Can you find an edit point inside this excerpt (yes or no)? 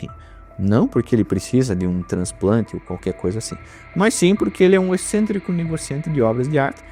no